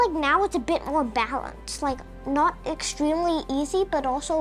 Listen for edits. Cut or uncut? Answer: uncut